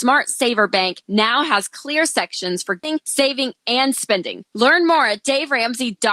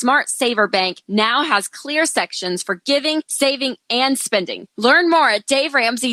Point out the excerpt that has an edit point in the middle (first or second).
first